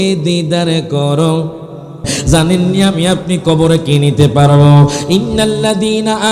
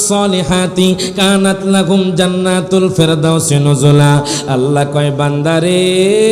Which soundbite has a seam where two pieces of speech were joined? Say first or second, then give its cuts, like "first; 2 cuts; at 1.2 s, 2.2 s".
first; 1 cut; at 2.1 s